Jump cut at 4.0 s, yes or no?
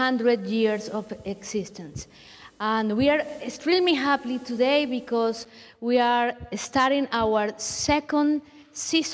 no